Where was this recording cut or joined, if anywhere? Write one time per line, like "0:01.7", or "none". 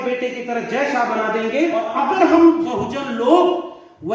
0:01.8